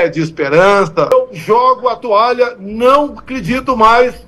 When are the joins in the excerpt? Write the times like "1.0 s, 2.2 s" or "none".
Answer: 1.1 s